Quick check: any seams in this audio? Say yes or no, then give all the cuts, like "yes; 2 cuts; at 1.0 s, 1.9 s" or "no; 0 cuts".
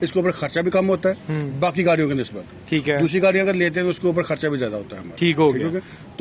no; 0 cuts